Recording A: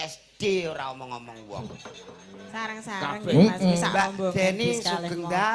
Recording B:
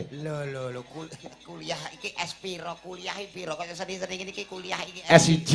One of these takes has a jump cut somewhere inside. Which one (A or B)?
A